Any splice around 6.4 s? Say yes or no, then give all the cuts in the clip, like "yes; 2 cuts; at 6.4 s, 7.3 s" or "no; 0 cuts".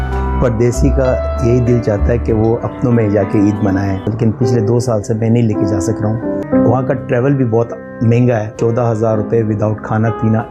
yes; 3 cuts; at 4.0 s, 6.4 s, 8.6 s